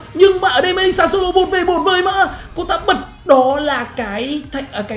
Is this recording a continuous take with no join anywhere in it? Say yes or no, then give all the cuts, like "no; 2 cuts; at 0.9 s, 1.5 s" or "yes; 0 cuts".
yes; 0 cuts